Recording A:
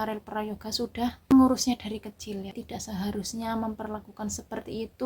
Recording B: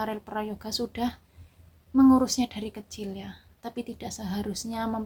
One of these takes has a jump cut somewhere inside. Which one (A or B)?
A